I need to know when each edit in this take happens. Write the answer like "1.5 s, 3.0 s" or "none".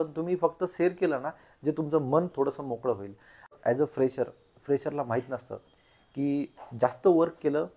3.5 s